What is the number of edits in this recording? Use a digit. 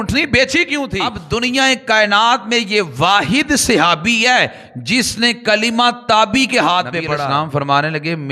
2